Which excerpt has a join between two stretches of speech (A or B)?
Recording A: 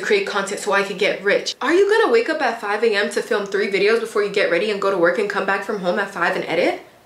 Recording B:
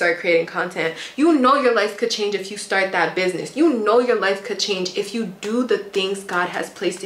A